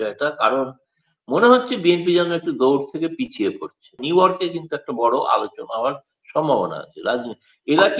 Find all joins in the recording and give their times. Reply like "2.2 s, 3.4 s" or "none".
4.0 s